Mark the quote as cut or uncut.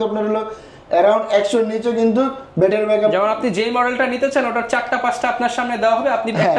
uncut